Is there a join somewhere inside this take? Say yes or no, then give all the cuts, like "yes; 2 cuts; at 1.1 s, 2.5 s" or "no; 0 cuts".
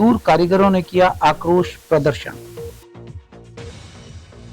yes; 1 cut; at 2.4 s